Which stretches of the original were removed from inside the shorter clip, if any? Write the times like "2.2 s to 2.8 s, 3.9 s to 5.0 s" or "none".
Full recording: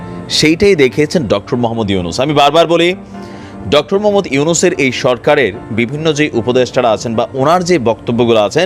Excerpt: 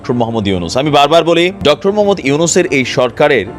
3.0 s to 3.6 s